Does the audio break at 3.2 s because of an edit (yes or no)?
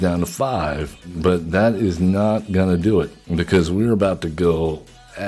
yes